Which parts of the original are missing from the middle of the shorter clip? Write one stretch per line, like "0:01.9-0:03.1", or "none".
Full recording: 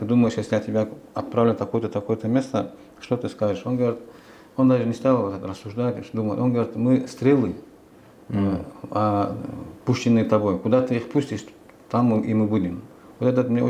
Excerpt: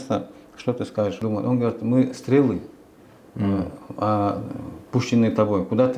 0:03.6-0:06.1